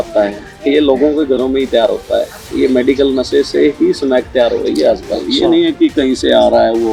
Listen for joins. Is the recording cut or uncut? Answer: uncut